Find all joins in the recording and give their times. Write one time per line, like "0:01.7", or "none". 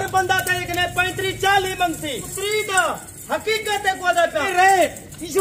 0:02.3
0:04.5

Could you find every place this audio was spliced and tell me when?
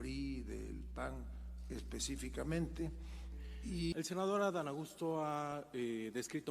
0:03.9

